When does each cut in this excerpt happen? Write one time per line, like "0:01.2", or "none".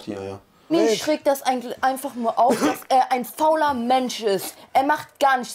none